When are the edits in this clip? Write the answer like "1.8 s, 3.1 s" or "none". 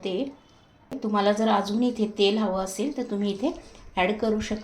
1.0 s